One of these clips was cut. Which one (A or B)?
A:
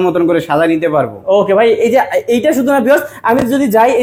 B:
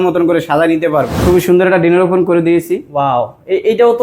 B